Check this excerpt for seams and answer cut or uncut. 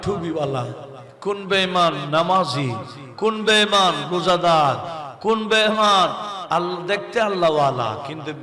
uncut